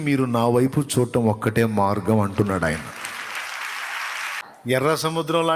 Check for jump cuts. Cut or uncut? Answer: cut